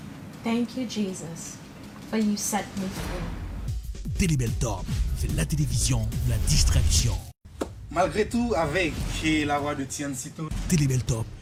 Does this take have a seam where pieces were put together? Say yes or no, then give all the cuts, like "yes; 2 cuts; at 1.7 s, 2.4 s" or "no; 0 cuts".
no; 0 cuts